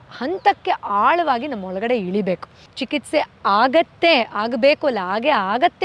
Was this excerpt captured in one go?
no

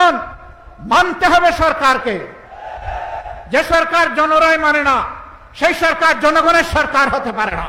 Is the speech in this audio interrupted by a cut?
no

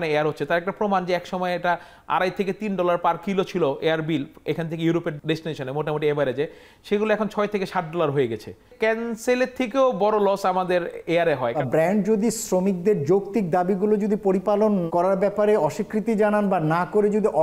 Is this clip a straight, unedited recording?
no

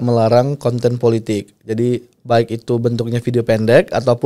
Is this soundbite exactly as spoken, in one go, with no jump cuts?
yes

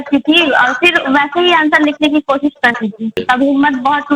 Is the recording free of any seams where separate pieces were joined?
no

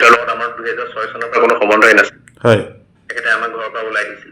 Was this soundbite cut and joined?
no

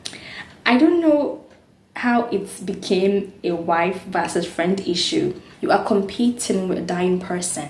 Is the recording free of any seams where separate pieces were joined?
no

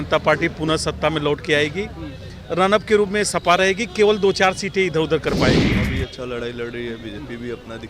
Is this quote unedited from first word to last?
no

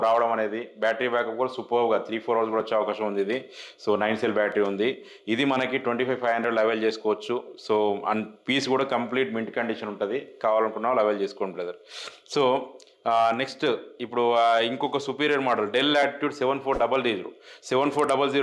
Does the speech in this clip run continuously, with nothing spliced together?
yes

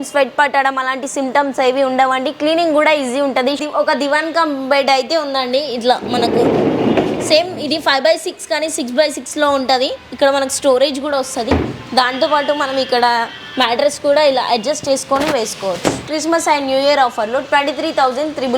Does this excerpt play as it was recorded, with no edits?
no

